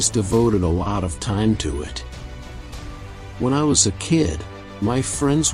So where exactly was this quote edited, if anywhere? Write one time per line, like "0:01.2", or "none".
none